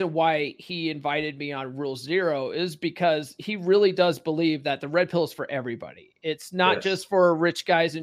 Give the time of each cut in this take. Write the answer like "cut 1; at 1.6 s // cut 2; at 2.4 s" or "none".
none